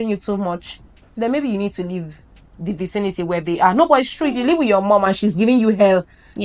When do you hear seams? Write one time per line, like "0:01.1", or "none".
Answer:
none